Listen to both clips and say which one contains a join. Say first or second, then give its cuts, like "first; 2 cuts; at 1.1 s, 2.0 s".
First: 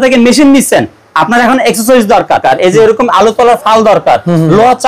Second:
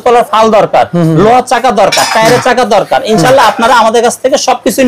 first; 1 cut; at 2.4 s